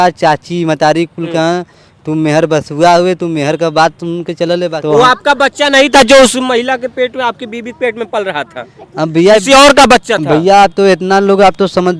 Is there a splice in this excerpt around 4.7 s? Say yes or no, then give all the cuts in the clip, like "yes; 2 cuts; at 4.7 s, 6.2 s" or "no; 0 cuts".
yes; 1 cut; at 4.7 s